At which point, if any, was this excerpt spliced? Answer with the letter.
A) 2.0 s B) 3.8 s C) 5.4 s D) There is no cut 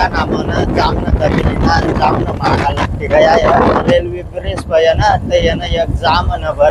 B